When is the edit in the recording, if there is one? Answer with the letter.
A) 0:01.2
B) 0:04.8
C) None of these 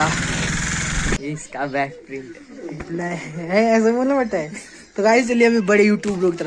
A